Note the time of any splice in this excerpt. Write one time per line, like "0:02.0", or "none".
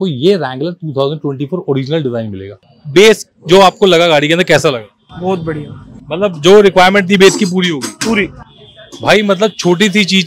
0:02.7